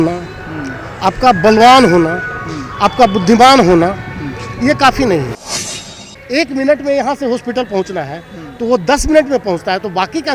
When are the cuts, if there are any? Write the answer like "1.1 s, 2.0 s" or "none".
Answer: 5.8 s